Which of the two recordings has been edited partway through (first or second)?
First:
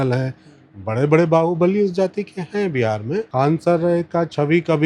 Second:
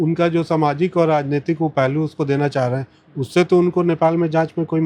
first